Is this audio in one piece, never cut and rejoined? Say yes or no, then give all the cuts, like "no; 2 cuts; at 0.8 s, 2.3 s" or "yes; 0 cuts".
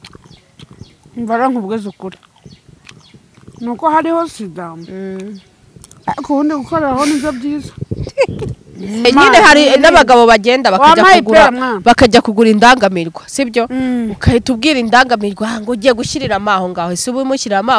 no; 1 cut; at 9.0 s